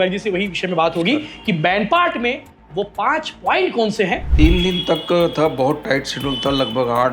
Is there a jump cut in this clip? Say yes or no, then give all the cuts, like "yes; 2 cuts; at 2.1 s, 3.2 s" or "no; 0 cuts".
yes; 1 cut; at 4.2 s